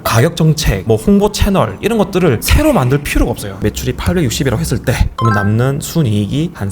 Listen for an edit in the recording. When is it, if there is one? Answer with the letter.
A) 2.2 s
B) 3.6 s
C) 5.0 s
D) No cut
B